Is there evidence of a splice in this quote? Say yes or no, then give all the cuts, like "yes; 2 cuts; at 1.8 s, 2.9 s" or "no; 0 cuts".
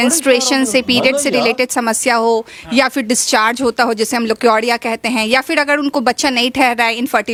no; 0 cuts